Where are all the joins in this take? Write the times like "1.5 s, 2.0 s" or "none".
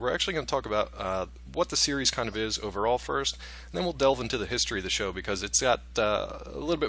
4.4 s